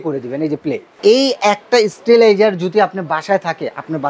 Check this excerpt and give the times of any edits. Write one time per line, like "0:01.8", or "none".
0:01.0